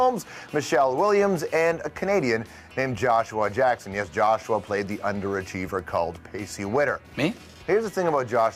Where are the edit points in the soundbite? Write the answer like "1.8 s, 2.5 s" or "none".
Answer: 1.4 s